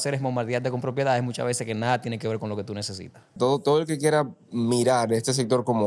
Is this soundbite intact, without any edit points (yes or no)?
no